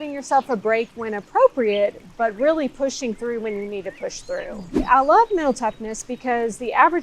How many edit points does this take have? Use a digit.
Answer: 1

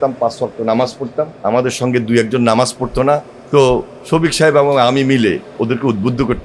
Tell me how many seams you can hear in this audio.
2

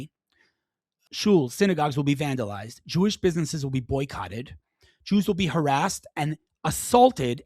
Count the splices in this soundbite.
1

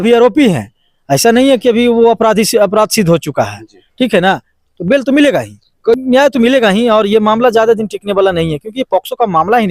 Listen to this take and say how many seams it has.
1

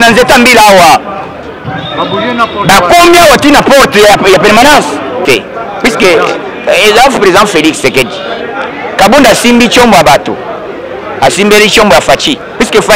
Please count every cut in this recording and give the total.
1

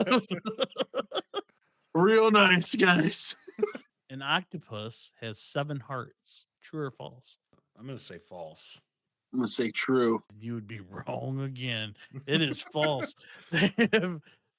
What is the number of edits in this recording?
3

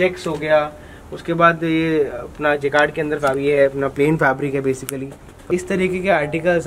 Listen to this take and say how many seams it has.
1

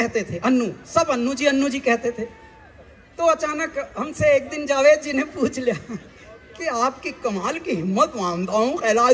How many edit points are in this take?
0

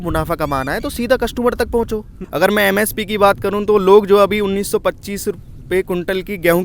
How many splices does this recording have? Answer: 1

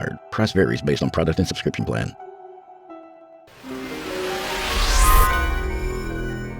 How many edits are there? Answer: 2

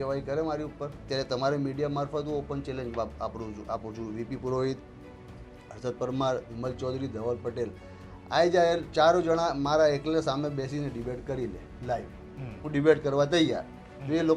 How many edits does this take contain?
1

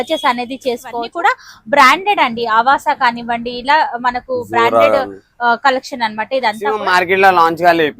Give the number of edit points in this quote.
2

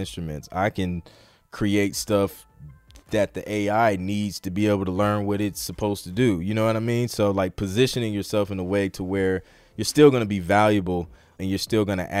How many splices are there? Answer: 0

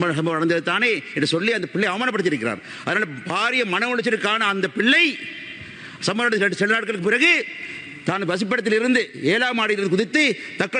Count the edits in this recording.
0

